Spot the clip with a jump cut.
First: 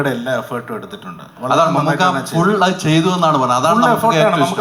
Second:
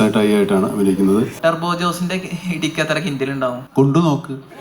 second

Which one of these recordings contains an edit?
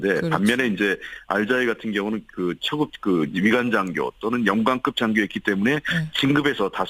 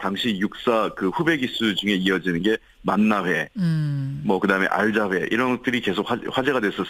first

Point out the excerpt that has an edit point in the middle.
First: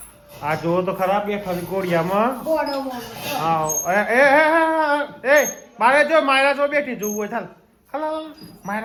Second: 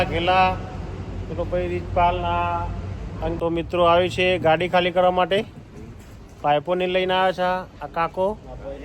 second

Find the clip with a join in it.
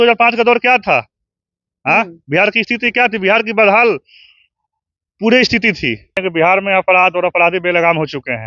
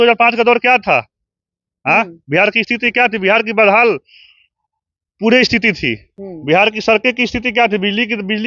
first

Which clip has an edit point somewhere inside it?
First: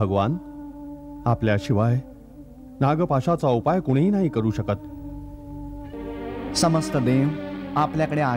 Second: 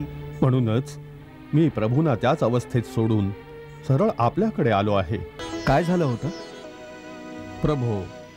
second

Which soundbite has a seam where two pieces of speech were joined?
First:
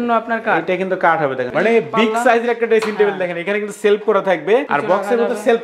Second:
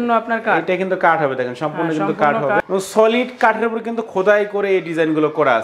first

